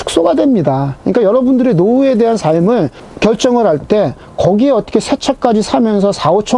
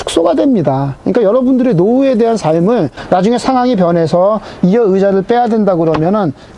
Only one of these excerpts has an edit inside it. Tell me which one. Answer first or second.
second